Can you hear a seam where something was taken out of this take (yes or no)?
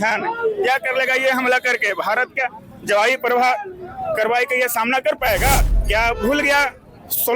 yes